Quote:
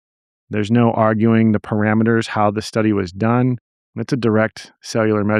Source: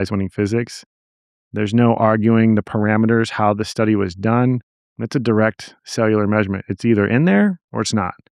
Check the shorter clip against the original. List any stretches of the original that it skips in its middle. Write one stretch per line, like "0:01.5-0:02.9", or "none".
none